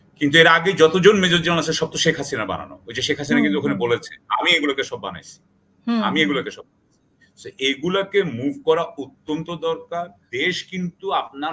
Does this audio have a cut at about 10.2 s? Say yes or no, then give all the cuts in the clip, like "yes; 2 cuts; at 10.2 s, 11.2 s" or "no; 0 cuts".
yes; 1 cut; at 10.2 s